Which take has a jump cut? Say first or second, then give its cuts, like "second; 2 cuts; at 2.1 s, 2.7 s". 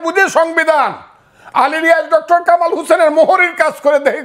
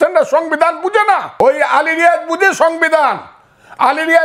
second; 1 cut; at 1.3 s